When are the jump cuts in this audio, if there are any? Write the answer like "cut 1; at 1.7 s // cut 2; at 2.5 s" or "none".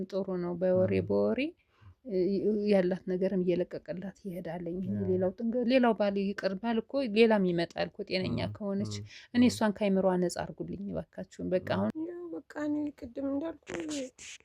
cut 1; at 11.9 s